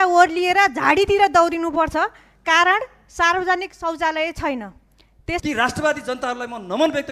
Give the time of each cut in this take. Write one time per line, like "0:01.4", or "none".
0:05.4